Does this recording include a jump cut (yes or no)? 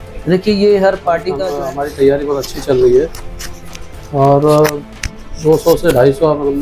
yes